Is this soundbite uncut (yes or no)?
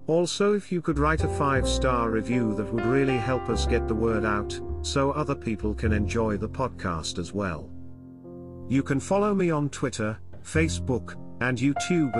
yes